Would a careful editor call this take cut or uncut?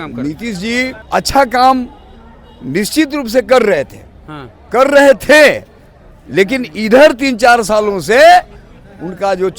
cut